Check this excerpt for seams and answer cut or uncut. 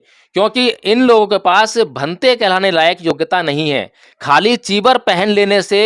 uncut